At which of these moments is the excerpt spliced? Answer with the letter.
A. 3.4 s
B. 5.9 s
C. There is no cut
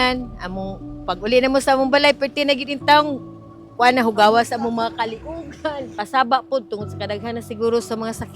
B